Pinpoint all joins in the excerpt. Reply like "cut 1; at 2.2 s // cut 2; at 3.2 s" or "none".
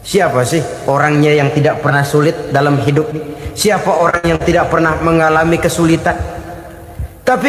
none